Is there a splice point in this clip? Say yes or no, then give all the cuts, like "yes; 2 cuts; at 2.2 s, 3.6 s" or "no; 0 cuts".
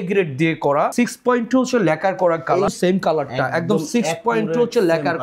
yes; 2 cuts; at 0.9 s, 2.7 s